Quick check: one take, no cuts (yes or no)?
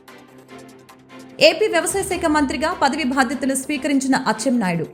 no